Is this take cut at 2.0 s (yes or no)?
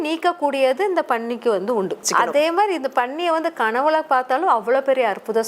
yes